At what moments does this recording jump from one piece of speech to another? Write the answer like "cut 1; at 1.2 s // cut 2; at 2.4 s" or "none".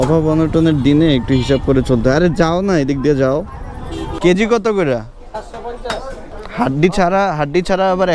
cut 1; at 4.1 s // cut 2; at 6.3 s

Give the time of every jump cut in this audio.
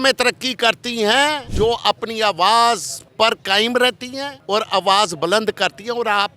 cut 1; at 1.4 s // cut 2; at 3.0 s // cut 3; at 4.3 s

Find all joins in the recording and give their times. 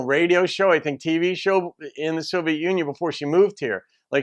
none

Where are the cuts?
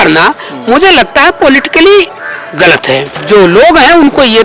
cut 1; at 3.2 s

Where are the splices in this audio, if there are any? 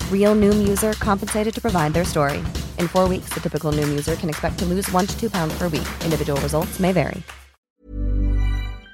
cut 1; at 7.7 s

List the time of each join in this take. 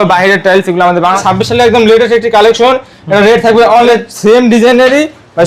cut 1; at 1.2 s // cut 2; at 3.9 s

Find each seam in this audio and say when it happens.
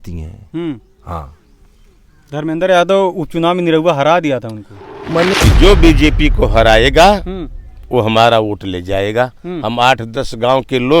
cut 1; at 5.3 s

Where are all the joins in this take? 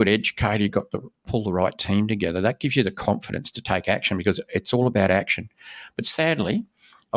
none

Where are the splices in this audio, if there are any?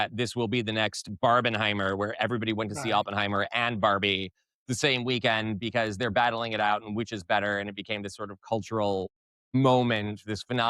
none

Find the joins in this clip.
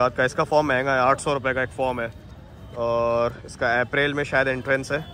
none

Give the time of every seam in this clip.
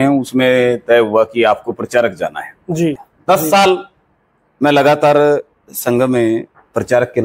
cut 1; at 3.1 s

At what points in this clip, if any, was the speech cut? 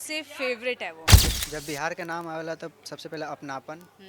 cut 1; at 1.1 s

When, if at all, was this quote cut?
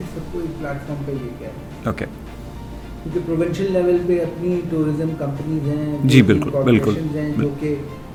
none

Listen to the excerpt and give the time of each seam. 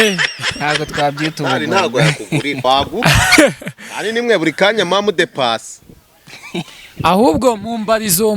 cut 1; at 2.6 s

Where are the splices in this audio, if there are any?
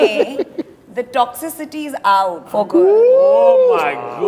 cut 1; at 2.4 s

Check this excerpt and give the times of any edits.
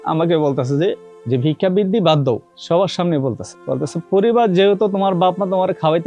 cut 1; at 1.1 s // cut 2; at 2.5 s // cut 3; at 3.5 s

